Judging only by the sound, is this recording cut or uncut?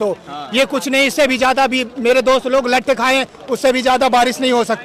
uncut